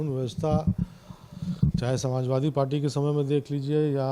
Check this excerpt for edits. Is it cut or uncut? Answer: uncut